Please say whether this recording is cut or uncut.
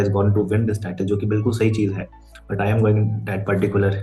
uncut